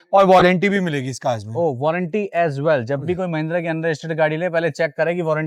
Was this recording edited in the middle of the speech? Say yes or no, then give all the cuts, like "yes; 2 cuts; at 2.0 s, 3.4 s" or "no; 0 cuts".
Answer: no; 0 cuts